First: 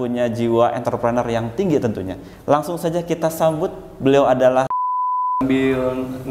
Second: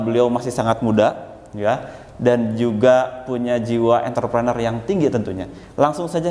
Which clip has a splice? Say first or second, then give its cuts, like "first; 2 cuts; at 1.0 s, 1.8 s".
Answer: first; 1 cut; at 5.3 s